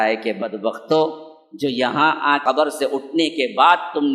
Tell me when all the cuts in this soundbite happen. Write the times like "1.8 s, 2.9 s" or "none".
2.4 s